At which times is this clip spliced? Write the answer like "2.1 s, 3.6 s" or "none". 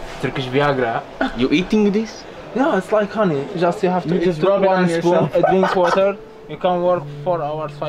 none